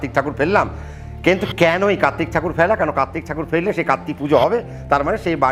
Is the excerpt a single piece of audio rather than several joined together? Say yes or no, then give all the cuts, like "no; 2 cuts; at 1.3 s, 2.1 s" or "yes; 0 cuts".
yes; 0 cuts